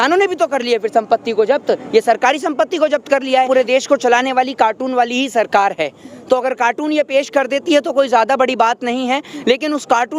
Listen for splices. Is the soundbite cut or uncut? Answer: cut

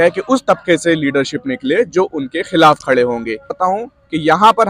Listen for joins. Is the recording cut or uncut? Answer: cut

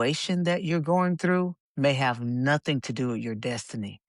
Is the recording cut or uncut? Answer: uncut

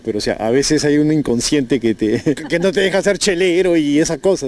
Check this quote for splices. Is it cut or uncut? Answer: cut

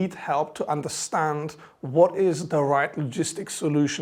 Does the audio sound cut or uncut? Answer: uncut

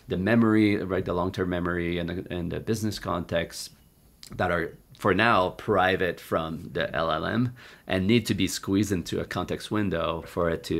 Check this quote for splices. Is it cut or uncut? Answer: uncut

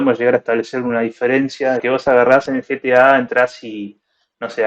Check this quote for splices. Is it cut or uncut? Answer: cut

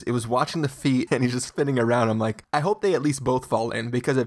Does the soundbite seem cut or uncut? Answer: cut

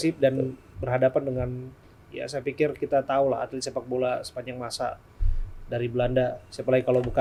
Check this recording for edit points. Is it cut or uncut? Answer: uncut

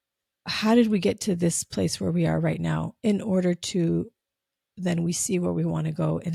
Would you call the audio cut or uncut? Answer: uncut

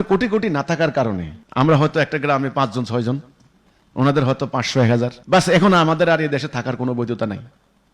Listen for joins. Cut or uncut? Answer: cut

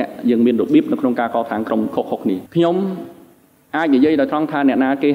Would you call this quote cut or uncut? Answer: cut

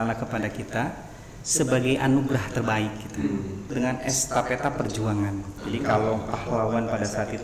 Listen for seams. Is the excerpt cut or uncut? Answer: cut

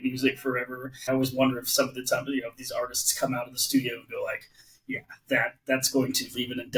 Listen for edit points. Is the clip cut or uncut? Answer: cut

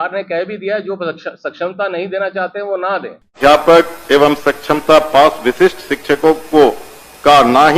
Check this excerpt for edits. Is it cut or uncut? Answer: cut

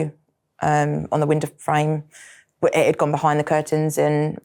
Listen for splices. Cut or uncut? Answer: uncut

